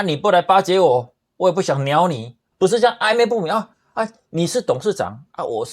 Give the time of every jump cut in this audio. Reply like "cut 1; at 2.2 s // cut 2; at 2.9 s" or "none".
cut 1; at 2.4 s